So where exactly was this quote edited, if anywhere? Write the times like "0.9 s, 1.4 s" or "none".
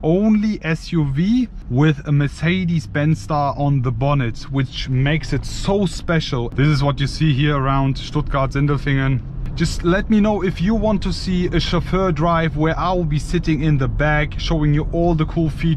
1.6 s, 6.5 s, 9.4 s